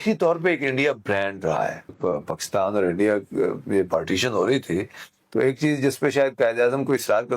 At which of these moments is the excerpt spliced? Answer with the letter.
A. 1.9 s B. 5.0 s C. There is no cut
A